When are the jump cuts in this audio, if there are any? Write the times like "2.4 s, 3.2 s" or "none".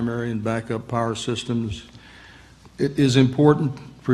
1.2 s